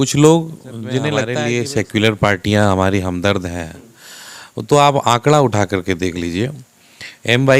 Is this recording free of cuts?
no; 1 cut; at 1.2 s

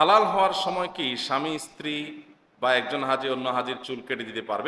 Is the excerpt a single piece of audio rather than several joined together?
yes; 0 cuts

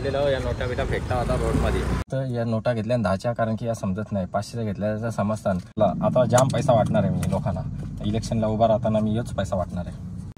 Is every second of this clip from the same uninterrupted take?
no; 2 cuts; at 2.1 s, 5.8 s

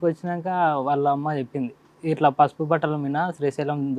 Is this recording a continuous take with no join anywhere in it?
yes; 0 cuts

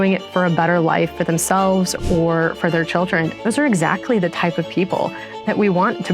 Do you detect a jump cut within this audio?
yes; 1 cut; at 3.3 s

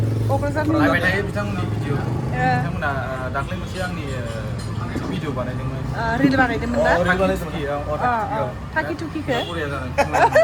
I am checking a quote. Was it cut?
no; 0 cuts

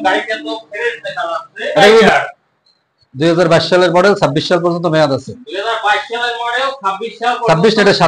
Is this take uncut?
no; 1 cut; at 2.1 s

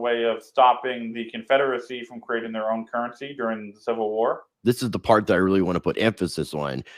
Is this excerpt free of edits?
no; 1 cut; at 4.5 s

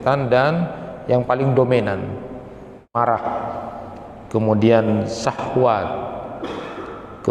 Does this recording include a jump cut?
yes; 1 cut; at 3.0 s

